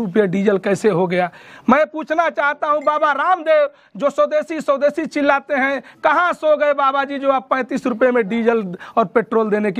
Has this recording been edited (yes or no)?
no